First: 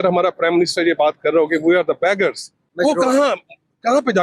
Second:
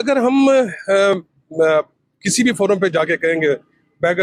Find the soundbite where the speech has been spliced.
first; 1 cut; at 2.6 s

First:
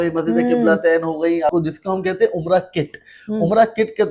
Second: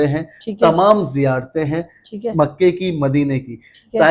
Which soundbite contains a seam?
first; 1 cut; at 1.5 s

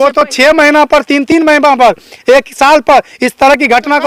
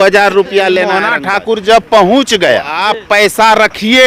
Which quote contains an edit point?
second; 2 cuts; at 1.0 s, 2.8 s

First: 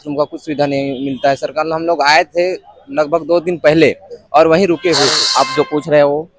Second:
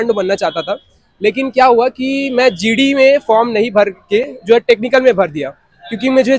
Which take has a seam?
first; 1 cut; at 5.2 s

